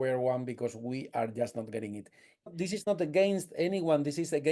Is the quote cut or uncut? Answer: cut